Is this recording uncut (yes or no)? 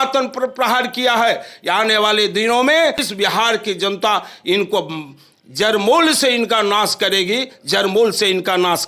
no